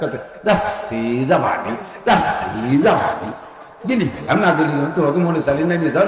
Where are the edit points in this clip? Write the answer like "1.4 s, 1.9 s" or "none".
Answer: none